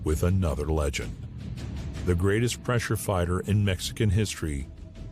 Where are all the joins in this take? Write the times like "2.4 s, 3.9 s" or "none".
none